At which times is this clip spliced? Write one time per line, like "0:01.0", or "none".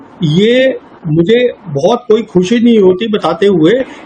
none